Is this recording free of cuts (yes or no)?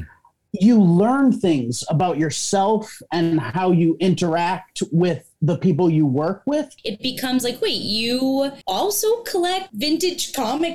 no